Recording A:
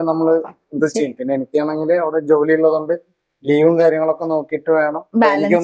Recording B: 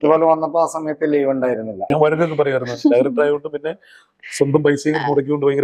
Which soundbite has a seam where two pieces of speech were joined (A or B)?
B